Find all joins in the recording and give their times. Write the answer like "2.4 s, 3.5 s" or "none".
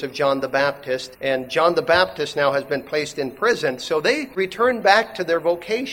1.1 s, 4.4 s